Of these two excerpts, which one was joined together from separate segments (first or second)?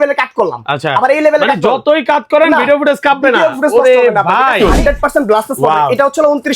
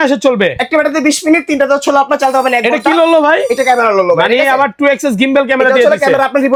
first